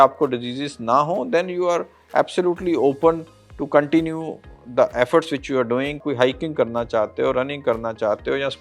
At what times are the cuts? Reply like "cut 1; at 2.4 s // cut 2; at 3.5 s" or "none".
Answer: cut 1; at 6.0 s